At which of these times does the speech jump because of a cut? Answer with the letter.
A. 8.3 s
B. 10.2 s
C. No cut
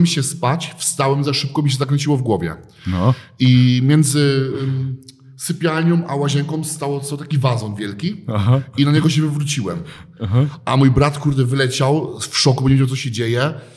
C